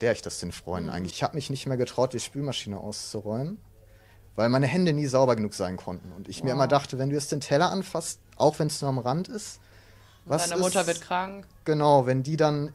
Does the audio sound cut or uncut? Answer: cut